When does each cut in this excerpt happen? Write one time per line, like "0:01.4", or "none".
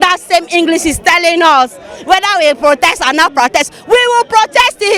none